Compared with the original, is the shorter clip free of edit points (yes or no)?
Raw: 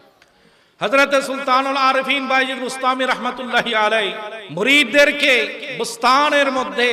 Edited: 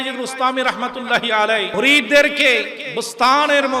no